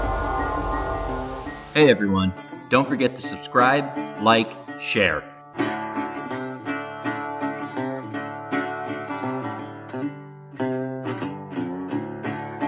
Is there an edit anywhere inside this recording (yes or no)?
no